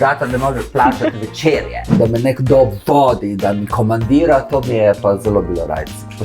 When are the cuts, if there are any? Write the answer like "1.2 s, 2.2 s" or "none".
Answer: 2.0 s

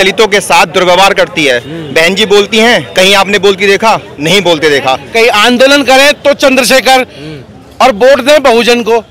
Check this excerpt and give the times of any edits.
5.0 s

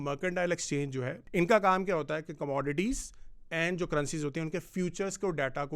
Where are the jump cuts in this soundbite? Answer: 1.2 s

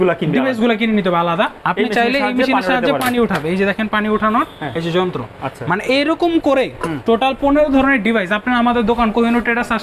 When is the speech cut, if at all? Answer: 1.6 s

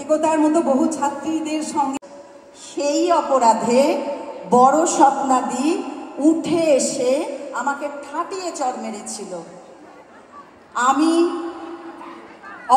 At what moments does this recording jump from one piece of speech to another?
2.0 s

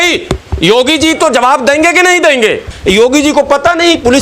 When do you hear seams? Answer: 2.7 s

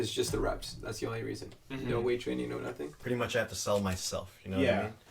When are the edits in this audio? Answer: 2.9 s

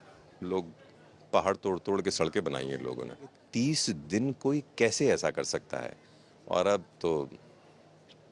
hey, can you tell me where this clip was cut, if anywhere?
3.4 s

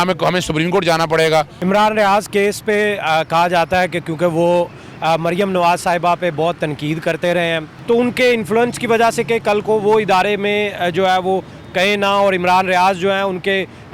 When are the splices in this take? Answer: 1.5 s, 7.7 s

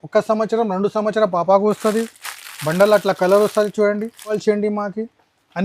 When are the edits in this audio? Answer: 4.4 s

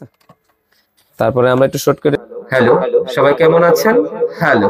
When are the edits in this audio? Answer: 2.2 s

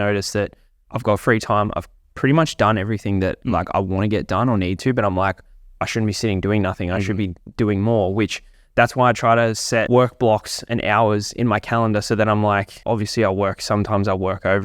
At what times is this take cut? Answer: 9.9 s, 12.7 s

